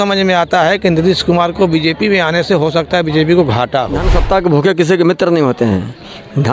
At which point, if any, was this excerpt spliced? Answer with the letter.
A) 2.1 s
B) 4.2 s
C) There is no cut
B